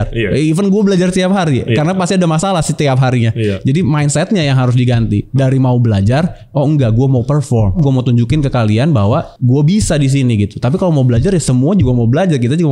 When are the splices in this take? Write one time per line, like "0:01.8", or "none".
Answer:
0:07.8
0:09.3